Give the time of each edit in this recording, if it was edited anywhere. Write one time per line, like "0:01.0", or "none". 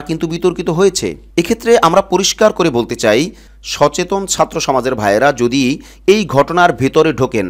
none